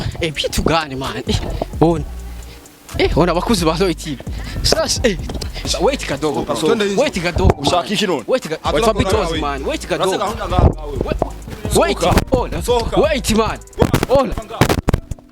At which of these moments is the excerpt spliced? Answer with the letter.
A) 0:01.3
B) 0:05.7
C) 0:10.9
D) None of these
B